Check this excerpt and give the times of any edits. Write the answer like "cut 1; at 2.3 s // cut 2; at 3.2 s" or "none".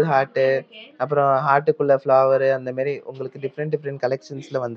none